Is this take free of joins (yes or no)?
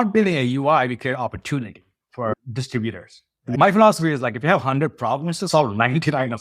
no